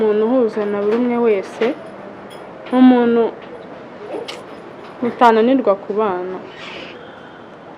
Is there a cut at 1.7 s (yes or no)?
no